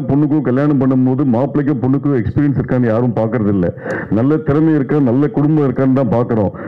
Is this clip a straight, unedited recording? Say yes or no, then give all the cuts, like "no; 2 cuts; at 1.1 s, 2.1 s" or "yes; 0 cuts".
yes; 0 cuts